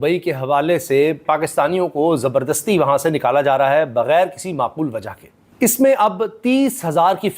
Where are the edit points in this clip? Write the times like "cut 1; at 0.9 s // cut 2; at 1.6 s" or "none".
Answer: cut 1; at 1.2 s